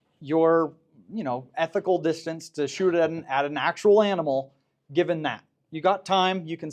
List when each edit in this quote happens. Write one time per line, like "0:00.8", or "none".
none

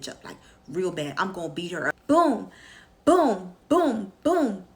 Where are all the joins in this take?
0:01.9

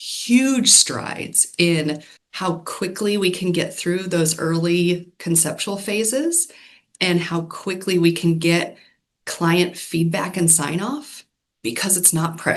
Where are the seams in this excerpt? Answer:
none

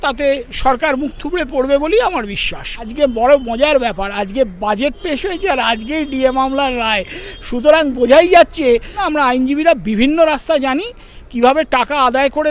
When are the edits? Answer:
0:02.9
0:09.0

